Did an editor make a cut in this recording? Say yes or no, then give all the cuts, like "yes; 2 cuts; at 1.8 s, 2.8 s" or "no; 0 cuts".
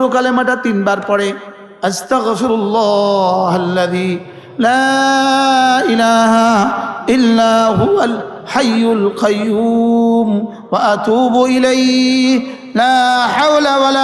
no; 0 cuts